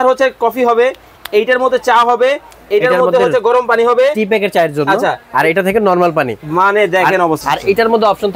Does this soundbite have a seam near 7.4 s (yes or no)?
yes